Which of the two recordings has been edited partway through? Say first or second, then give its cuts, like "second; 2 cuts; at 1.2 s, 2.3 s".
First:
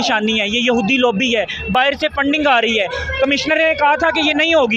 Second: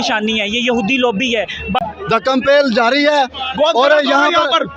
second; 1 cut; at 1.6 s